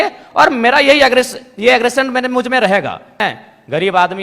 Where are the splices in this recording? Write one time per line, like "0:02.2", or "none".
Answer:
0:03.2